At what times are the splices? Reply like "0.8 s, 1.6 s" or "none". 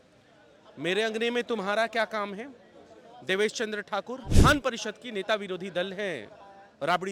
4.3 s